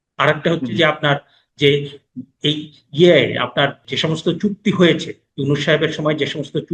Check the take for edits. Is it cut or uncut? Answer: cut